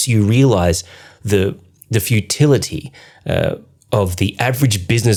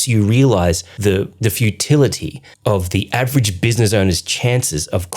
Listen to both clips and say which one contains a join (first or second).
second